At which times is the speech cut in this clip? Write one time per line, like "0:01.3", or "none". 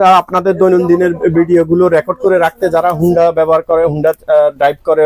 none